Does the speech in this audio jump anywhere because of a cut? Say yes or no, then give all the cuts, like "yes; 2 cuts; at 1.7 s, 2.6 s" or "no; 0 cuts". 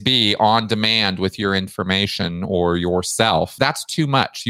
yes; 1 cut; at 3.5 s